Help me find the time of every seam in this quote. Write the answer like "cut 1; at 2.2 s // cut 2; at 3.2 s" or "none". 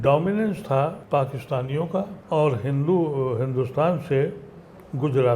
cut 1; at 1.0 s // cut 2; at 2.2 s